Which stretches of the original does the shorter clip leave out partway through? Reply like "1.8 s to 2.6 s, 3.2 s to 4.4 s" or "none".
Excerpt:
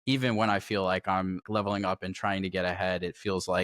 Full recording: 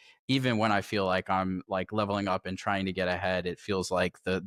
1.7 s to 1.9 s